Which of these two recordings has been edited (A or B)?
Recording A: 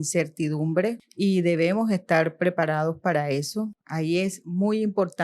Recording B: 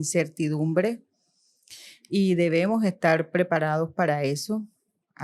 A